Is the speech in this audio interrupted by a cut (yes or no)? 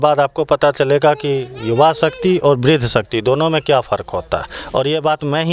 no